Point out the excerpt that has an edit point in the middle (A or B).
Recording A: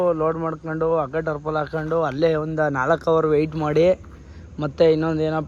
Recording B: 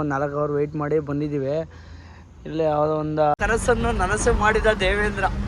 B